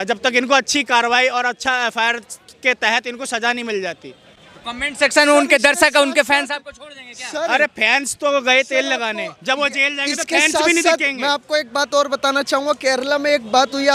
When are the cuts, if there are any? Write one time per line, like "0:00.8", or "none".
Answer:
none